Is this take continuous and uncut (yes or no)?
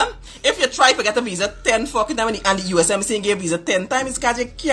yes